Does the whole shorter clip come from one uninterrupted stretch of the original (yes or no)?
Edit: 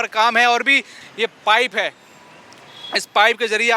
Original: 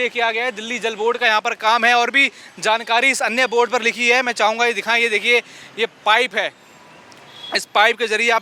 no